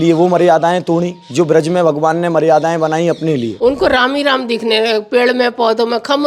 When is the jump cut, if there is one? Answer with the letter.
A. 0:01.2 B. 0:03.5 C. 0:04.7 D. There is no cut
B